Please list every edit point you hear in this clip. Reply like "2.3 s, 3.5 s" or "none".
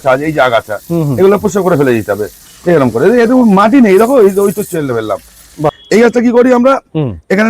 5.7 s